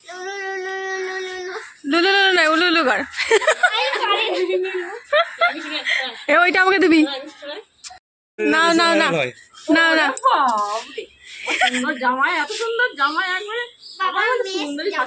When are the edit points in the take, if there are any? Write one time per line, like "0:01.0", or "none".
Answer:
0:08.3

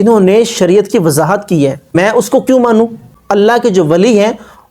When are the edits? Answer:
0:01.9
0:03.0

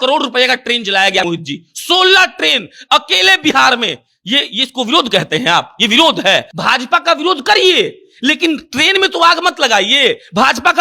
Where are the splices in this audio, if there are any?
0:01.2
0:06.5

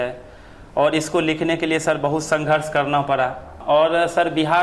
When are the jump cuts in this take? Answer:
0:03.5

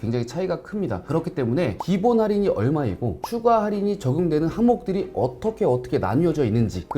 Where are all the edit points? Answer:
0:01.8

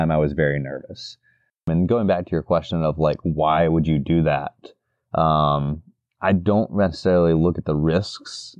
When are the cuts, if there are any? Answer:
0:01.6

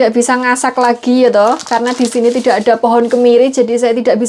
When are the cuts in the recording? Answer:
none

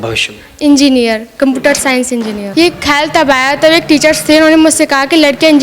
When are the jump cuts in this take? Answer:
0:02.5

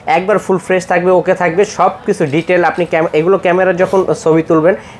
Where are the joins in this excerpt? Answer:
none

